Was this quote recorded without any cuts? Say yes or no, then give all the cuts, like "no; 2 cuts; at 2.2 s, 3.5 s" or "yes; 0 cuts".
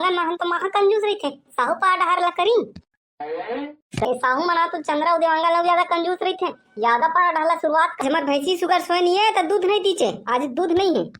no; 2 cuts; at 4.0 s, 8.0 s